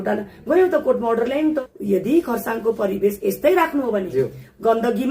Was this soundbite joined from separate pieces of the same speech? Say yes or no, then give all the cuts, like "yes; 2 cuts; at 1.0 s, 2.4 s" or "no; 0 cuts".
yes; 1 cut; at 1.7 s